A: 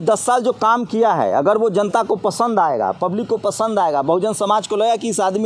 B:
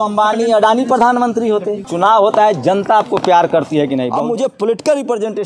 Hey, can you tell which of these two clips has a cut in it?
B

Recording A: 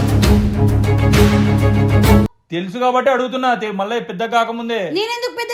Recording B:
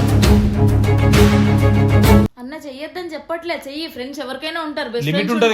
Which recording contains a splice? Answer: B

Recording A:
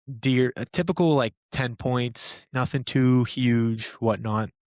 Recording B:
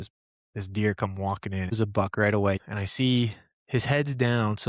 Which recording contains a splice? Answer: B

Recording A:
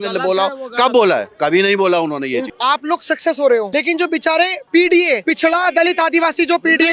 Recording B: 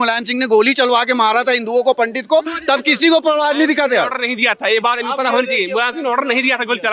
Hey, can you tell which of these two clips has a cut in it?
A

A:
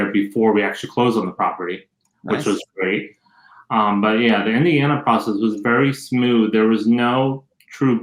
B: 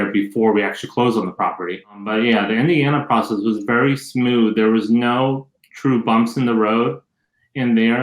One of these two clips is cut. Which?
B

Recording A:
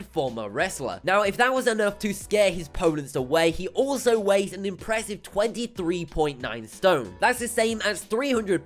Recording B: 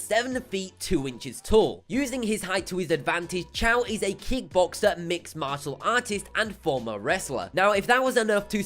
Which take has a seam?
B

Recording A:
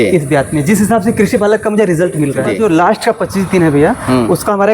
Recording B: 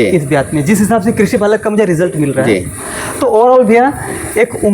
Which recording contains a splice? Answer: A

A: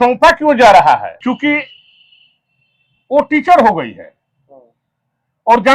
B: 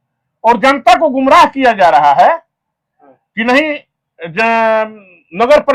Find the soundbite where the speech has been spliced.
A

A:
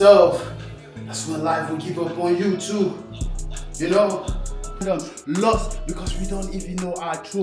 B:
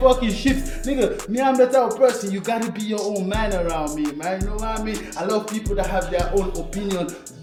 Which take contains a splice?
A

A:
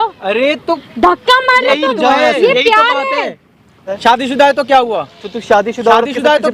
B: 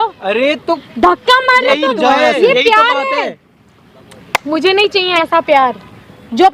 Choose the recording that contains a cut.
A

